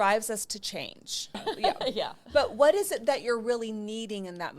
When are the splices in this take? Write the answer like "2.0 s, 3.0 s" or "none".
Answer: 1.4 s